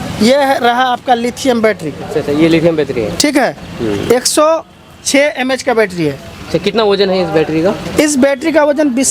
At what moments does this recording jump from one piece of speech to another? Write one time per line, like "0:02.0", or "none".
none

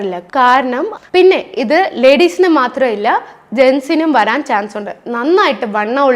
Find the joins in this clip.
0:00.9

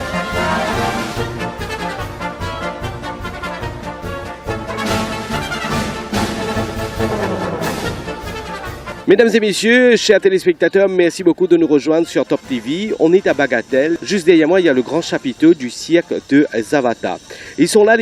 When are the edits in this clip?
none

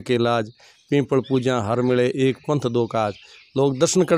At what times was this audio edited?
none

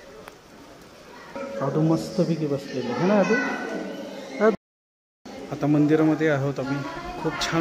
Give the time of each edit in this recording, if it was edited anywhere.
0:01.4
0:04.5

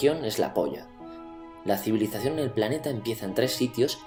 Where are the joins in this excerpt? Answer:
none

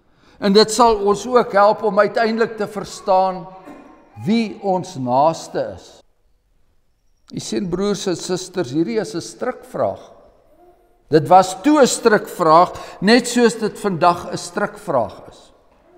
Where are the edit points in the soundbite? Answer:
0:06.0

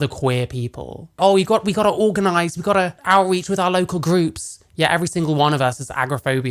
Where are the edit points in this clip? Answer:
0:01.2
0:03.0

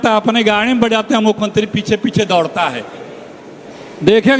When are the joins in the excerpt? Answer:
none

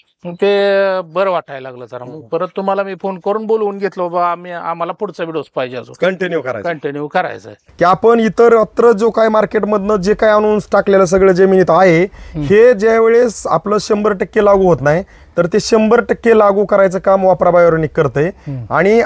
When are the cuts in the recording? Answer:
0:07.6

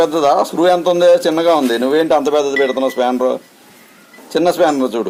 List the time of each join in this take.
none

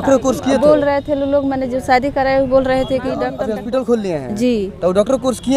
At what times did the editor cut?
0:03.4

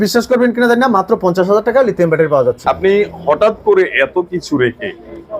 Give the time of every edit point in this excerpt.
0:02.6

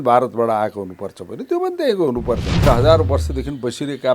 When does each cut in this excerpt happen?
0:02.5

